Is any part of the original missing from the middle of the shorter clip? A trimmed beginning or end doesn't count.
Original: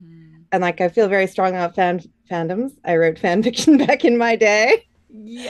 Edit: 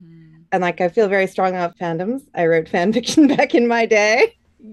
yes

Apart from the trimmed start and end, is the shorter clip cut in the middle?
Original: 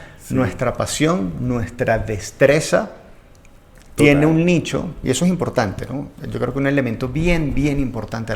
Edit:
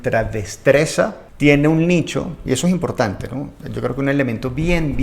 yes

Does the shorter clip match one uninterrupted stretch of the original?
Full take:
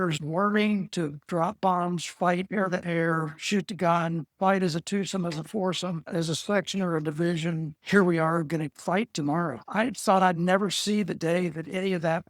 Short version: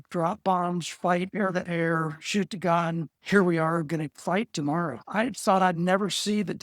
no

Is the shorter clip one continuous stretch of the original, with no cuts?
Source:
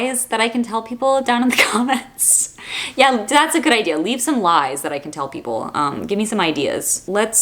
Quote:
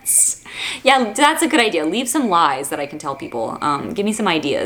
yes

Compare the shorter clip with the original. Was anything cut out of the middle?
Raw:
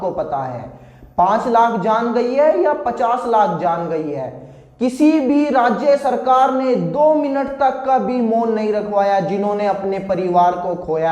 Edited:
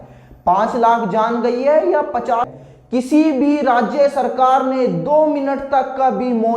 yes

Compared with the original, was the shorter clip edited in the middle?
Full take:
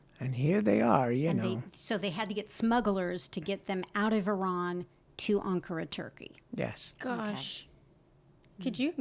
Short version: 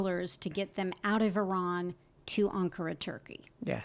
no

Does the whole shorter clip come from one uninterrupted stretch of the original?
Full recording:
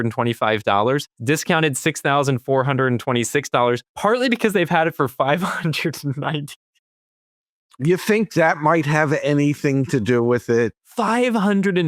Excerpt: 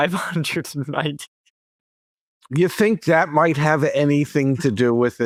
yes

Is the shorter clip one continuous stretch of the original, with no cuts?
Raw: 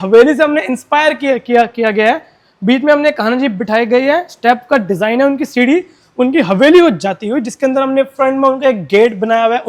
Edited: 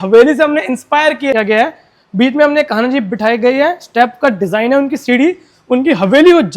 no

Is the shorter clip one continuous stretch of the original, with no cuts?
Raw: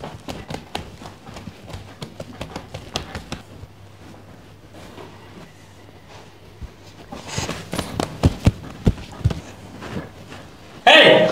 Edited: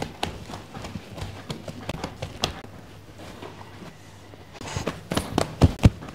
no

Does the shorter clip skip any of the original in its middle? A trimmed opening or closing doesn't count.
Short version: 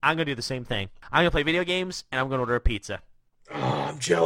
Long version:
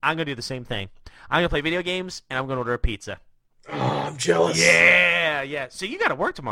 yes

